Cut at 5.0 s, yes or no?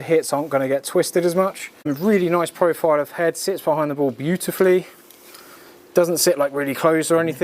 no